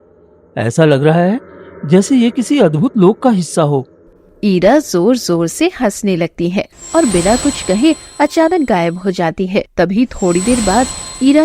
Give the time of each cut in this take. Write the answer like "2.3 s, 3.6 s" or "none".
6.8 s, 9.7 s